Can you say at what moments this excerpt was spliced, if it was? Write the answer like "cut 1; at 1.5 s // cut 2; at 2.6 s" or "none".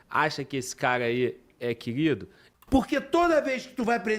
cut 1; at 2.4 s